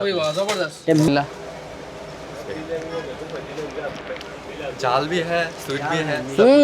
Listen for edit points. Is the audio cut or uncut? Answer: cut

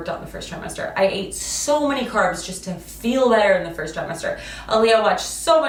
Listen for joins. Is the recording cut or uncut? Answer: uncut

